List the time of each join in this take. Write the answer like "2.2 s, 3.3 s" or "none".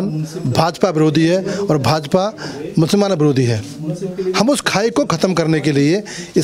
none